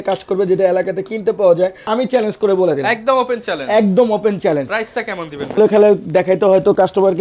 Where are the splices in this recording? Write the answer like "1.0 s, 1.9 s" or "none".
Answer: 1.9 s, 5.6 s